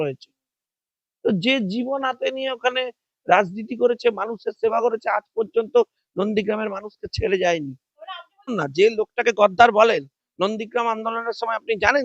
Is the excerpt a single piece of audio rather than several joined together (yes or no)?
no